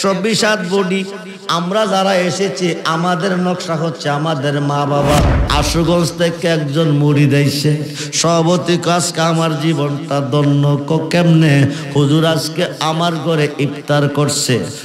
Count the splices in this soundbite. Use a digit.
1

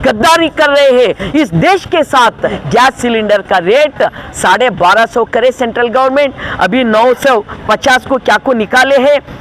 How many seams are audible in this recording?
1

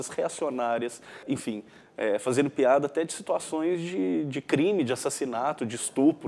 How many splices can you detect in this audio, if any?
1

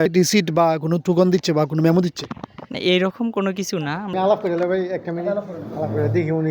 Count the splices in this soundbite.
1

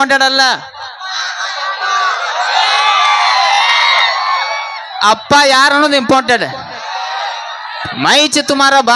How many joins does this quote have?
0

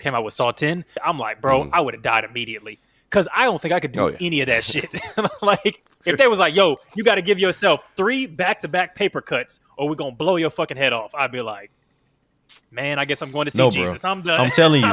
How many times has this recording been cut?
2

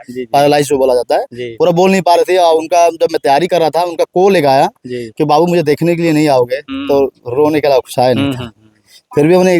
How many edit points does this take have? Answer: 0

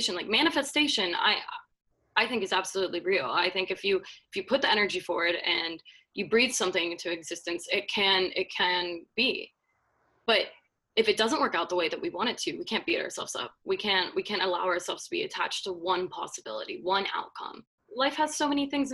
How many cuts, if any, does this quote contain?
1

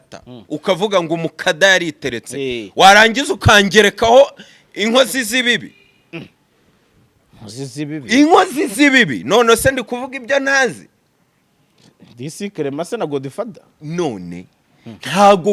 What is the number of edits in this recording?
0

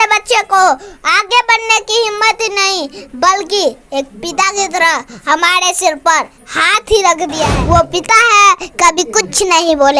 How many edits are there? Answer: 1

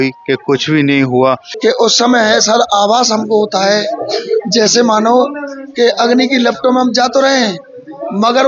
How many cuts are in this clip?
1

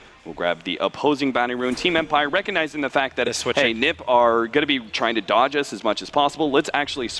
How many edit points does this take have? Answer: 1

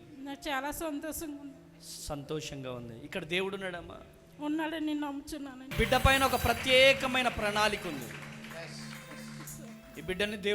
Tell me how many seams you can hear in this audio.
1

